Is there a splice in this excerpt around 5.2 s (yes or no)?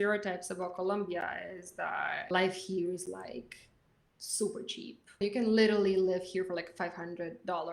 yes